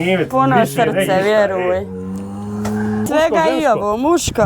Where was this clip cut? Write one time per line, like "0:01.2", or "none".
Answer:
0:03.1